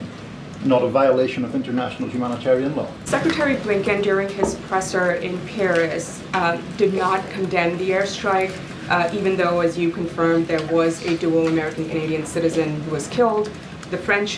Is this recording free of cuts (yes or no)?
no